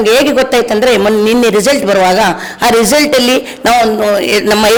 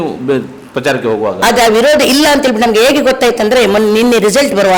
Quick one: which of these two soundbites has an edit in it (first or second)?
second